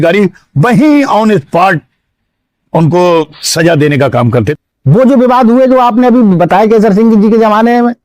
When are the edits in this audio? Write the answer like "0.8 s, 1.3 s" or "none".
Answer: 4.5 s